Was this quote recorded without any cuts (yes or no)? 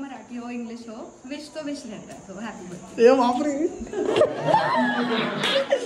yes